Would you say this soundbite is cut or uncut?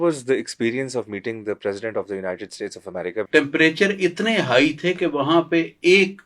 cut